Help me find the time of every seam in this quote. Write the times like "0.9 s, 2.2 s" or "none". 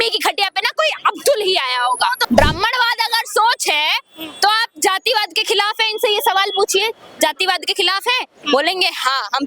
2.2 s